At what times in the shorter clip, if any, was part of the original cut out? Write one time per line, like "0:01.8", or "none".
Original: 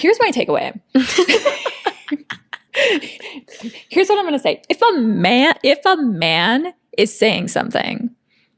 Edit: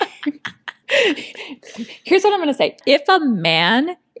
0:02.8

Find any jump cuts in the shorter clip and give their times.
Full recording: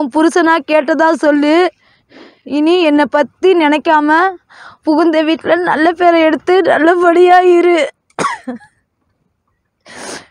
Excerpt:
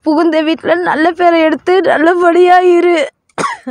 none

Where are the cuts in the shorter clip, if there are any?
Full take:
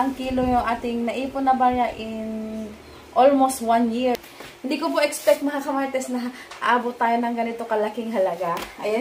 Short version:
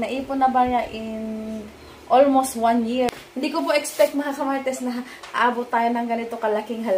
0:03.3

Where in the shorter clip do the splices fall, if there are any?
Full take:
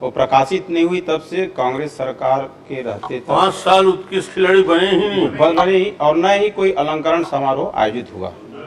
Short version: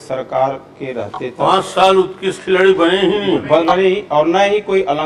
none

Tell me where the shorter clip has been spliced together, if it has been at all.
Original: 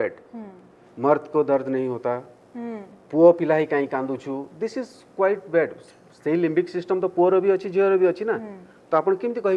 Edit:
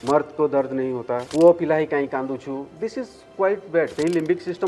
0:01.3
0:03.9

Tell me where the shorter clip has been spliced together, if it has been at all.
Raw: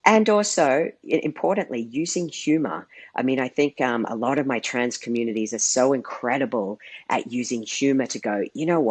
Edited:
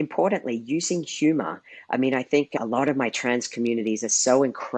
0:02.6

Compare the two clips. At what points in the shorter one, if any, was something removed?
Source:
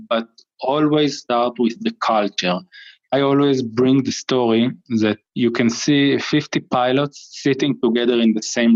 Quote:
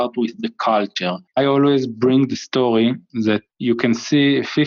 0:01.2

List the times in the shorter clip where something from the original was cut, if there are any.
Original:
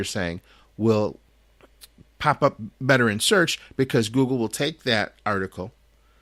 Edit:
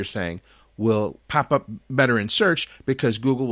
0:01.2

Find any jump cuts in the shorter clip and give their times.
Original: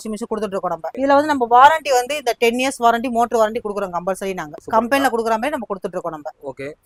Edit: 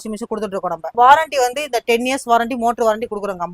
0:00.9

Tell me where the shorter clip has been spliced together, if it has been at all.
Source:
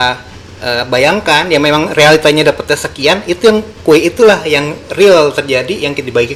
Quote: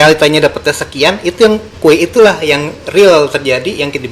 none

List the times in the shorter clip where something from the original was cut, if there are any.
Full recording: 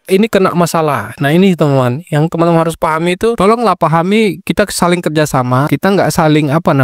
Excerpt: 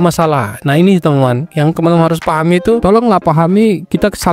none

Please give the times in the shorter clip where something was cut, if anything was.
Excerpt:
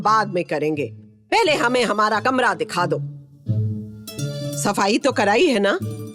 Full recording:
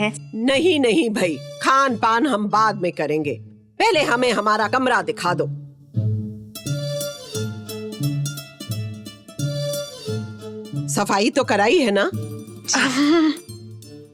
0:04.4

